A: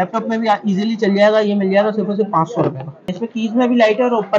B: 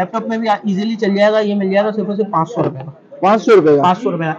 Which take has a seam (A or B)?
A